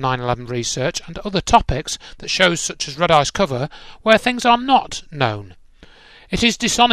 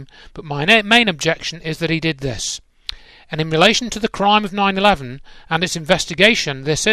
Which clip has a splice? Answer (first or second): second